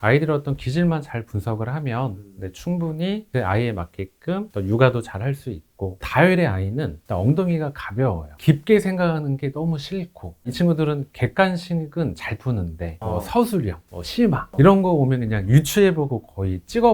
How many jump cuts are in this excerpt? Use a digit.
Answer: 1